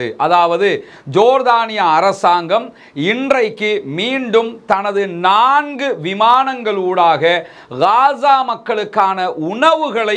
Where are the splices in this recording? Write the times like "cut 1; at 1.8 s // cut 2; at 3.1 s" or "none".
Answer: none